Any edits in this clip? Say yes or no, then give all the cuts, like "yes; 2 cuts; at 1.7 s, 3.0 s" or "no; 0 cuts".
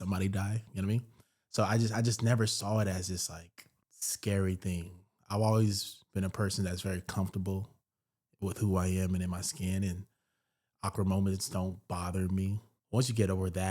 yes; 1 cut; at 12.7 s